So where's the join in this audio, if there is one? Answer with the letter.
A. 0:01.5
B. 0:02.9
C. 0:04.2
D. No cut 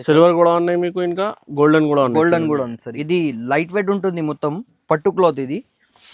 B